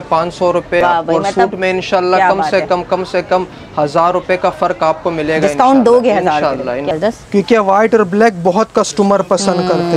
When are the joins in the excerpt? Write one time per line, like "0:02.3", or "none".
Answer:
0:00.8
0:06.9